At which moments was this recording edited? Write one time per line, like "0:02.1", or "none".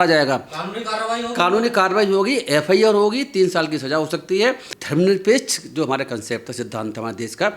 0:04.7